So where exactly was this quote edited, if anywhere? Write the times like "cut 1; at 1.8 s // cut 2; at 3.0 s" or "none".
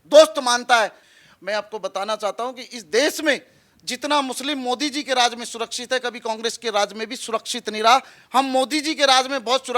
cut 1; at 1.0 s